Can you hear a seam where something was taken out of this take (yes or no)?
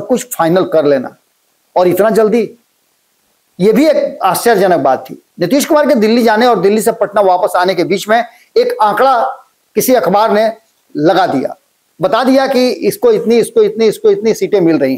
no